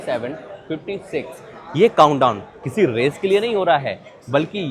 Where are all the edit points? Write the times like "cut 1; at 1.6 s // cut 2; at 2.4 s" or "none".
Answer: none